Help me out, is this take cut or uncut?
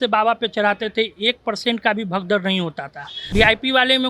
cut